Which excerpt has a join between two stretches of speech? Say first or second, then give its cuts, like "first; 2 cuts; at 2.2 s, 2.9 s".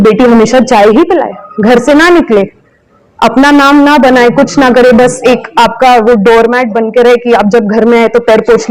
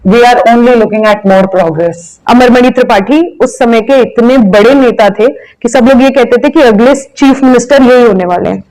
second; 1 cut; at 2.1 s